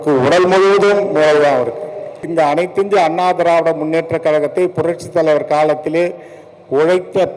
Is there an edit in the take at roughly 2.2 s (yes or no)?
yes